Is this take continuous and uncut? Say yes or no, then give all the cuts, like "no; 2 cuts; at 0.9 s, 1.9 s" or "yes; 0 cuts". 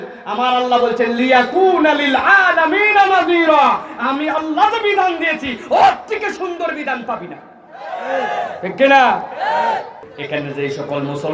no; 1 cut; at 10.0 s